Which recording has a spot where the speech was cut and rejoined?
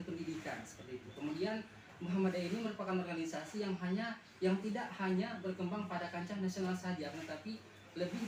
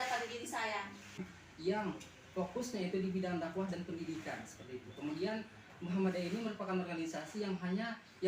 second; 1 cut; at 1.3 s

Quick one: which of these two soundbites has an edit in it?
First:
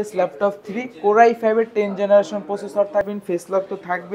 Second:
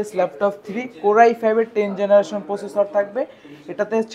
first; 1 cut; at 3.1 s

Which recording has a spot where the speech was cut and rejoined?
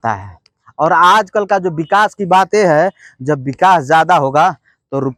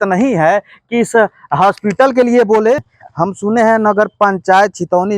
second; 1 cut; at 3.0 s

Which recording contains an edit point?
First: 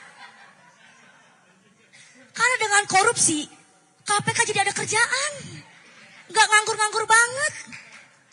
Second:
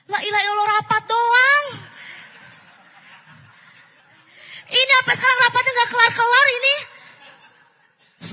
second; 1 cut; at 4.0 s

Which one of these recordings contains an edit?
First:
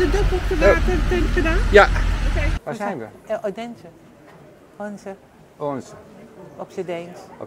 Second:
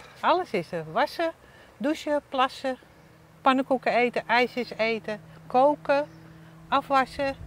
first; 1 cut; at 2.4 s

